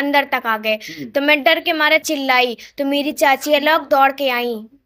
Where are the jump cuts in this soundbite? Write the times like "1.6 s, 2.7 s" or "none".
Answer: none